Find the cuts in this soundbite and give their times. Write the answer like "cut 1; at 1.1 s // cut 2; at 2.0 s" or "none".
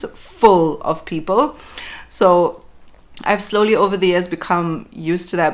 none